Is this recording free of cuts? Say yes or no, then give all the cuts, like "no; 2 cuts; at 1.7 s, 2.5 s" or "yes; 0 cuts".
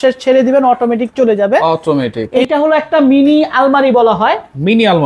no; 1 cut; at 2.2 s